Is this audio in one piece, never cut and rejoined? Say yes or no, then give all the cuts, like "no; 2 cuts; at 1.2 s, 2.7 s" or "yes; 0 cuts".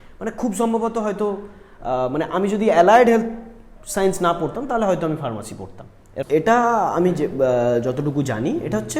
no; 1 cut; at 6.2 s